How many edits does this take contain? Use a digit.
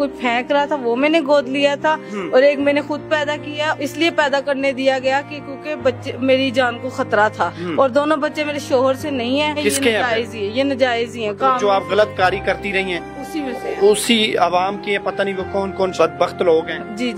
4